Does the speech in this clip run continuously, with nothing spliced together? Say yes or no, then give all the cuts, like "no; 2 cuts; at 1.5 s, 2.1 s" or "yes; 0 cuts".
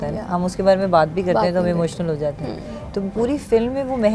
yes; 0 cuts